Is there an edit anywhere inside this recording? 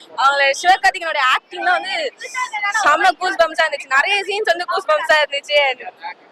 no; 0 cuts

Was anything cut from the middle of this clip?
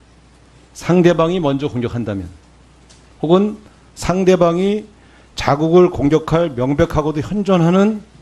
yes; 1 cut; at 4.7 s

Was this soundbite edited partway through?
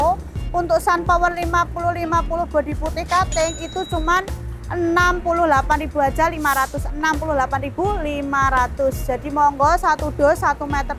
no; 0 cuts

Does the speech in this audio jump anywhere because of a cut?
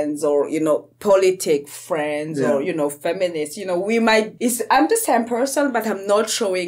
yes; 1 cut; at 4.3 s

